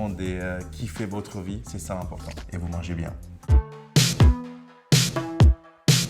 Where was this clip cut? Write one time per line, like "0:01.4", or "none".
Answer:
0:03.5